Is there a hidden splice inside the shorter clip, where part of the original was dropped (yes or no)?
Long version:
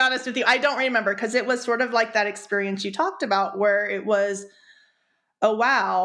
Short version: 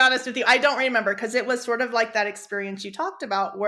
no